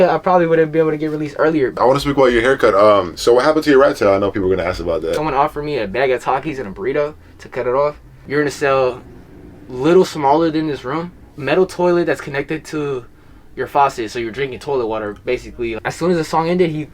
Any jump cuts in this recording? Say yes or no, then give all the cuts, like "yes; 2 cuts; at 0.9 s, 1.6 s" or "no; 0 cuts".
yes; 5 cuts; at 1.8 s, 5.2 s, 8.1 s, 11.3 s, 15.8 s